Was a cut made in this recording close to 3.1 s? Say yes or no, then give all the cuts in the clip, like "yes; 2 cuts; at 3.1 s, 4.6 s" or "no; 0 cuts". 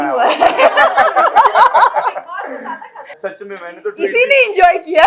yes; 1 cut; at 3.1 s